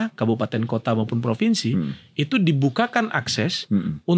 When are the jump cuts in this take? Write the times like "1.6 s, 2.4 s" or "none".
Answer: none